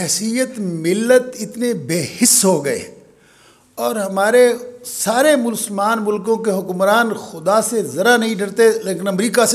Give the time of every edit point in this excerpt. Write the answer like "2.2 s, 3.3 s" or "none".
none